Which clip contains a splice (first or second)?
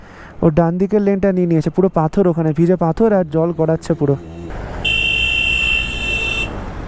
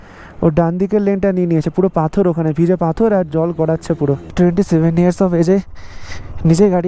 second